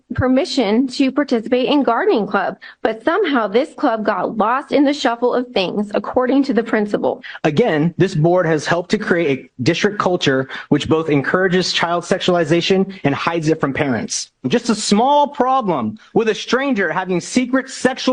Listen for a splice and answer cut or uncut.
cut